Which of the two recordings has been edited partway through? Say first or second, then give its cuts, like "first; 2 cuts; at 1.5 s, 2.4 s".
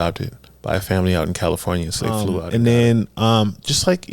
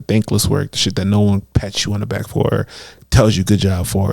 first; 1 cut; at 2.3 s